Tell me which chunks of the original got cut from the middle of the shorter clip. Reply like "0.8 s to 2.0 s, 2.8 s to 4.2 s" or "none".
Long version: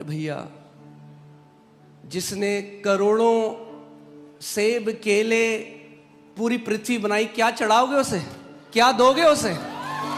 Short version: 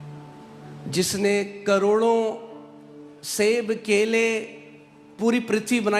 none